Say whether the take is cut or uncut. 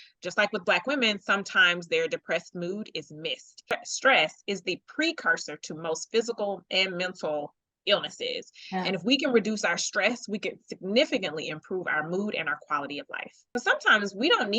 cut